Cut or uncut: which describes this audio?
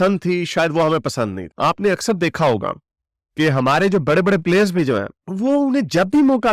cut